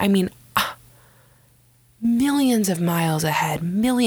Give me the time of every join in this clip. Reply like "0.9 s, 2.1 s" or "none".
none